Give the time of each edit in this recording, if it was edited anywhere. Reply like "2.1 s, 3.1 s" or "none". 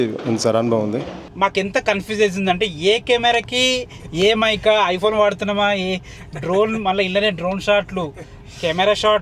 1.3 s